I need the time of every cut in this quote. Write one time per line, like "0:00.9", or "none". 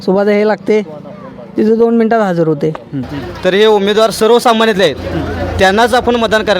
0:03.1